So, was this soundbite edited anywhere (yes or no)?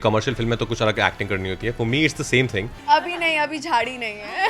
yes